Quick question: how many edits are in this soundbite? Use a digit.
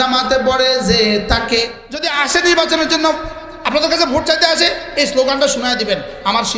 1